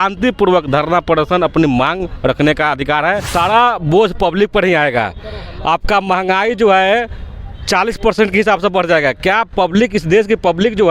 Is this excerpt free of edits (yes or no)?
no